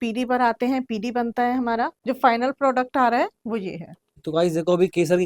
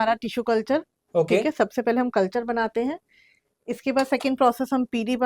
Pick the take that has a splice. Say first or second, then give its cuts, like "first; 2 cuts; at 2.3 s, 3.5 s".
first; 2 cuts; at 1.9 s, 4.2 s